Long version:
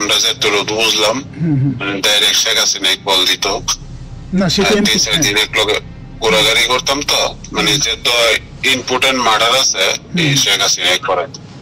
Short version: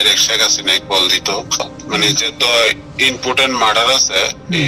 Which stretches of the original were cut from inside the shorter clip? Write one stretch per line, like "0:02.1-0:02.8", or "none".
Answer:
0:03.9-0:07.4